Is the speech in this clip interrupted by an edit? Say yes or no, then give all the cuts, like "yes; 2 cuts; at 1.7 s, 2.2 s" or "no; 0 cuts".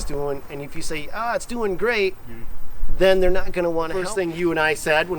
yes; 1 cut; at 4.0 s